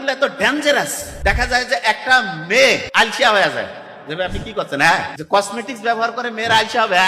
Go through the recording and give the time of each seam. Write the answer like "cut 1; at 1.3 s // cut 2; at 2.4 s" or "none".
cut 1; at 1.0 s // cut 2; at 2.9 s // cut 3; at 5.2 s